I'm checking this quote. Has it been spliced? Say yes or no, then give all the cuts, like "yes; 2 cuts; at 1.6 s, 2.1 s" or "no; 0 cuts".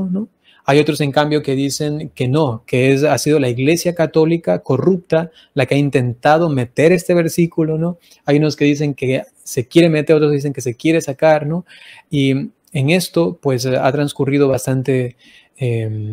no; 0 cuts